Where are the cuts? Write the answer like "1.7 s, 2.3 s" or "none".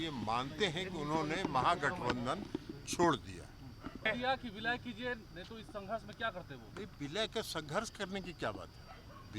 4.1 s